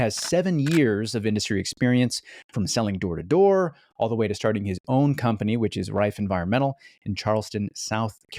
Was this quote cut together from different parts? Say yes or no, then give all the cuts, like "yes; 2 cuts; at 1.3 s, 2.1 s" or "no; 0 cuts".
no; 0 cuts